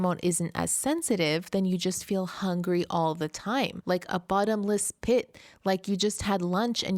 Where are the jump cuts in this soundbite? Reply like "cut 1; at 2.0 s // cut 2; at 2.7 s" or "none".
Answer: cut 1; at 3.8 s